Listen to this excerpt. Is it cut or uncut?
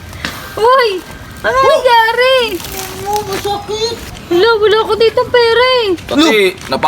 cut